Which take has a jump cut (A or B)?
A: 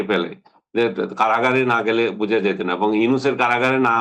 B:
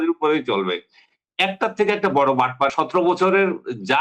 B